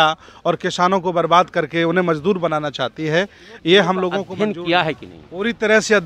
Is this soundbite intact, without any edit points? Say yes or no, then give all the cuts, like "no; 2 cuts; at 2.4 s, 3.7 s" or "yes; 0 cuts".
no; 1 cut; at 4.3 s